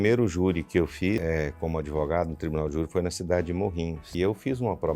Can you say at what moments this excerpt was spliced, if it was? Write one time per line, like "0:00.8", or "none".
0:01.2
0:04.0